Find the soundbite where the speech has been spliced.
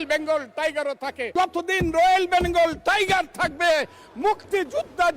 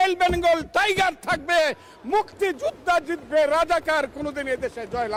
first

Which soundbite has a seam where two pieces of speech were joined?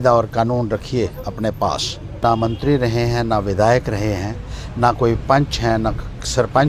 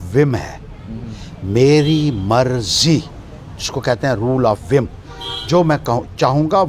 first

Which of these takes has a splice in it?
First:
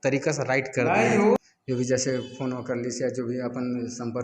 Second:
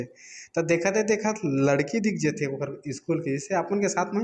first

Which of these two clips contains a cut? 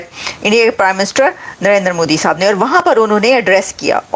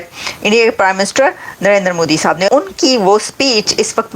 second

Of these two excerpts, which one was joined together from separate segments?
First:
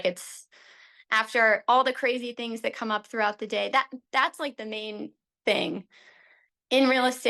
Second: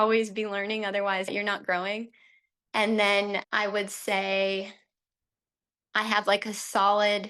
second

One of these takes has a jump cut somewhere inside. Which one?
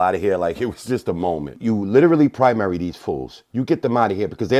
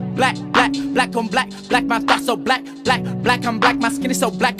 first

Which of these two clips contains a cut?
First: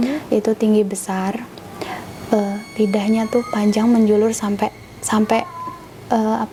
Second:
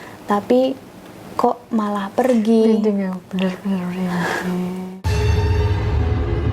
second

